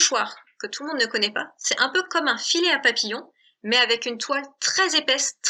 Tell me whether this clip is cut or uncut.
uncut